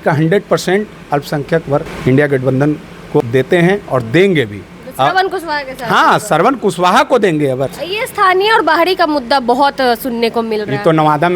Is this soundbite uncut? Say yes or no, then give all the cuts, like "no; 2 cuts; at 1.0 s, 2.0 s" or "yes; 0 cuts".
no; 3 cuts; at 1.9 s, 3.2 s, 7.8 s